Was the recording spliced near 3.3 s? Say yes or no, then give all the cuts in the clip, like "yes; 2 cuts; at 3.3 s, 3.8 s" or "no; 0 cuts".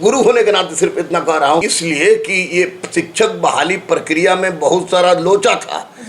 no; 1 cut; at 1.7 s